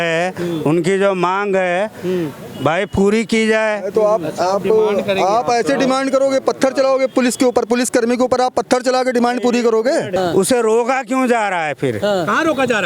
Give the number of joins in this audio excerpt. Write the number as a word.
one